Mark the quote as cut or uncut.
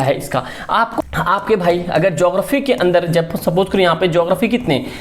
cut